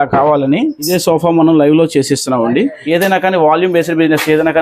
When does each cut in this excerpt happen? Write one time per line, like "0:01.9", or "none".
0:00.9
0:02.8